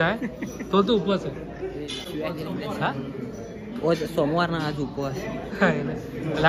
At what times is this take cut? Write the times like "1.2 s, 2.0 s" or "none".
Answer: 2.0 s